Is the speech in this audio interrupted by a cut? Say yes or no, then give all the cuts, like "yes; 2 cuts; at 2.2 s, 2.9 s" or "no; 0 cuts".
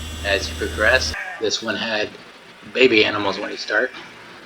yes; 1 cut; at 1.2 s